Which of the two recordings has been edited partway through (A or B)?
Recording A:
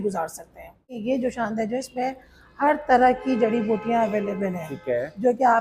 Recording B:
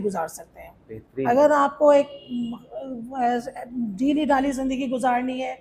A